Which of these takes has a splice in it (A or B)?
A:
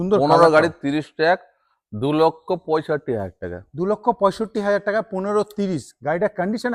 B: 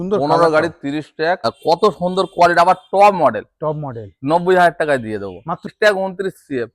B